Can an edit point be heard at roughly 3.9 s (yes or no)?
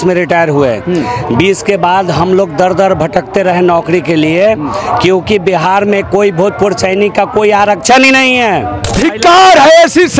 no